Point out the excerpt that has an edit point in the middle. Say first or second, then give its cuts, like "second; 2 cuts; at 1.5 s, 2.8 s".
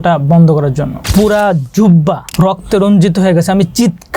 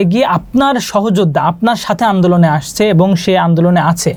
first; 2 cuts; at 1.0 s, 2.2 s